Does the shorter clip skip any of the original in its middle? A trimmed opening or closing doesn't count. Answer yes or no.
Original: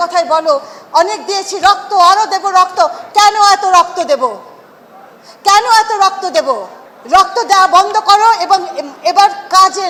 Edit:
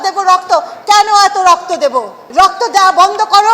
yes